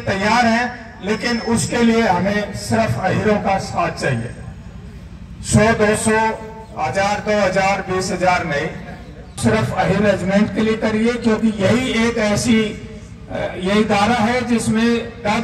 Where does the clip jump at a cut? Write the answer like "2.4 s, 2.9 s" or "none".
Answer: 9.3 s